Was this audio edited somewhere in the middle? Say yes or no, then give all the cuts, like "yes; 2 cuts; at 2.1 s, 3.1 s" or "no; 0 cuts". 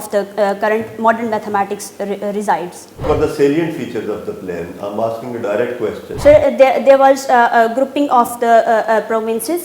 yes; 2 cuts; at 3.0 s, 6.1 s